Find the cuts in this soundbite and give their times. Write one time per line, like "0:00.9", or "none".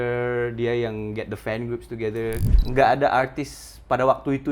0:02.5